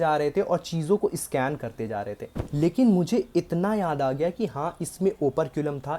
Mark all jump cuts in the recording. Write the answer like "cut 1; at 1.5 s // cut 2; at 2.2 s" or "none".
cut 1; at 2.3 s